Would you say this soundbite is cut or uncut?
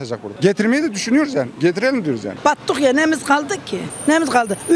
cut